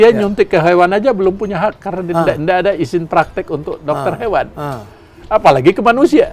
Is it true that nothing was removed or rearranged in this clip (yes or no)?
yes